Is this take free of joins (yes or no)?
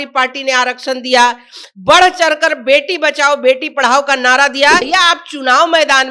no